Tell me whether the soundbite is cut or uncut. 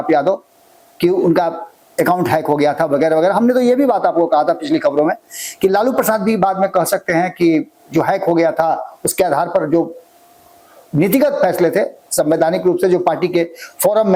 uncut